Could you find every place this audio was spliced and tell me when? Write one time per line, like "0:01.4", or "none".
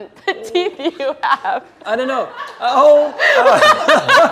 none

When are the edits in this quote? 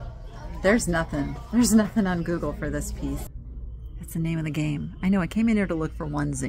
0:03.3

